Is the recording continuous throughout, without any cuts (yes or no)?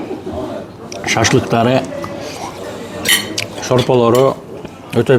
yes